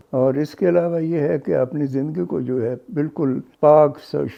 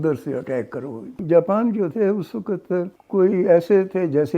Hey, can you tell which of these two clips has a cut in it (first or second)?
second